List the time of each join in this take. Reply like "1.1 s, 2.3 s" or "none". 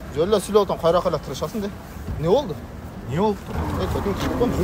3.5 s